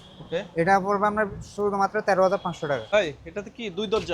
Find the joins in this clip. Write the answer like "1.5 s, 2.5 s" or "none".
2.9 s